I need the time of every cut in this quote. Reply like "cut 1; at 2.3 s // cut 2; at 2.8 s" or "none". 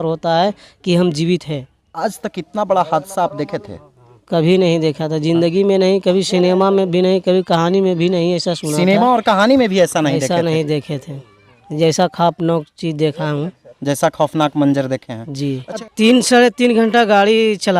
cut 1; at 1.9 s // cut 2; at 15.9 s